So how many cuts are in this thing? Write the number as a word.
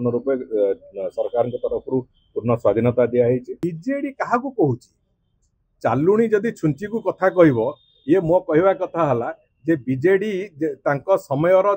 one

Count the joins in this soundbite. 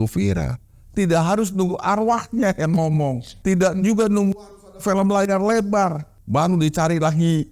two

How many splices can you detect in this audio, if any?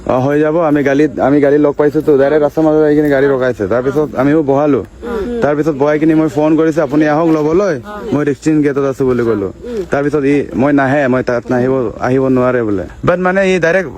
one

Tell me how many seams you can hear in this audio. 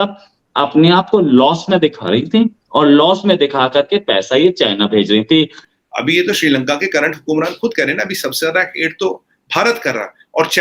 one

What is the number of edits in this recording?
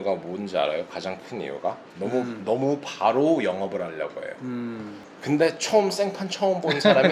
one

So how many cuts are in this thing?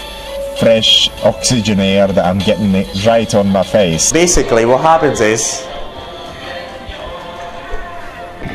one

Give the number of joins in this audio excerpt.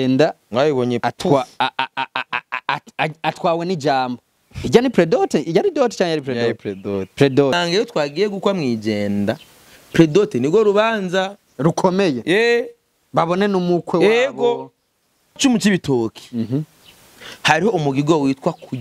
two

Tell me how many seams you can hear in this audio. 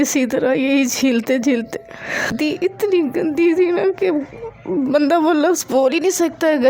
one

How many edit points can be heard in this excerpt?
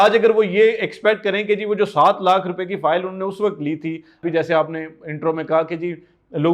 one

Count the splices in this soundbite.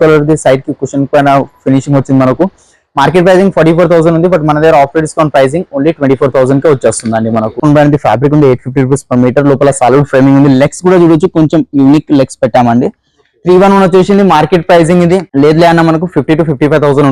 one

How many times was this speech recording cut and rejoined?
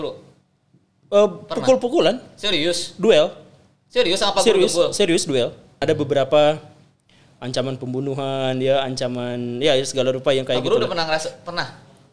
one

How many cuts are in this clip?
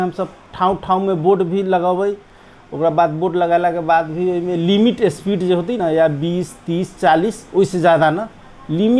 zero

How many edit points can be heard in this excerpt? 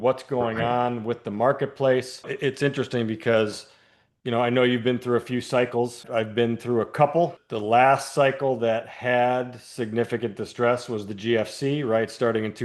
three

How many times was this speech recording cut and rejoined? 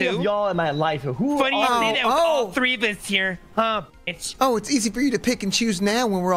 zero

